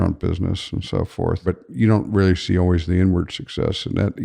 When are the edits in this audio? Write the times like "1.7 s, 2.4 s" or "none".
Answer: 1.4 s